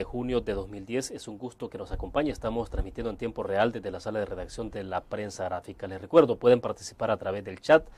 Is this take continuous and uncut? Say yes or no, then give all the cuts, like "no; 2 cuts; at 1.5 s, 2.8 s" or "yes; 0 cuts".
no; 1 cut; at 6.8 s